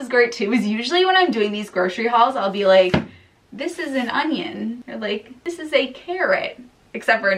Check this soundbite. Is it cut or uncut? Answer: uncut